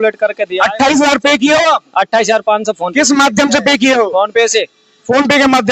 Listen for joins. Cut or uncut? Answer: uncut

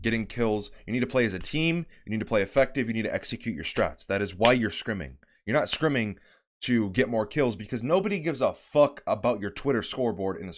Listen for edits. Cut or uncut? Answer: uncut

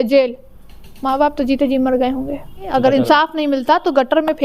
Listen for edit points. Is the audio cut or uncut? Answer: cut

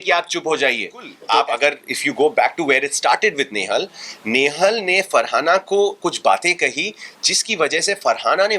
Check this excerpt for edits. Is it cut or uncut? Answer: cut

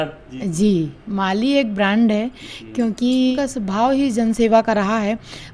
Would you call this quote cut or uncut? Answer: cut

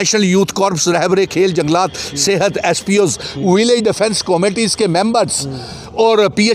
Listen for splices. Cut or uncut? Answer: uncut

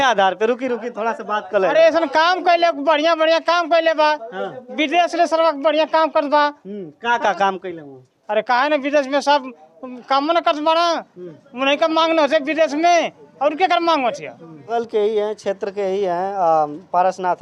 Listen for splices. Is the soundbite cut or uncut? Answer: cut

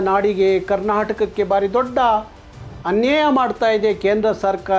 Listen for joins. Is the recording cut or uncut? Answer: uncut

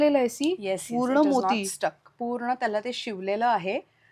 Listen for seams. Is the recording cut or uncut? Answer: uncut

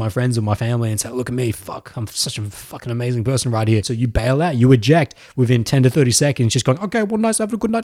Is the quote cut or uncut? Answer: cut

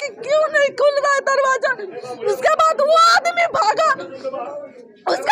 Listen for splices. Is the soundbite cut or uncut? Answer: uncut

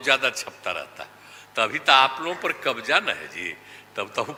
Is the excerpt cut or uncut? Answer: uncut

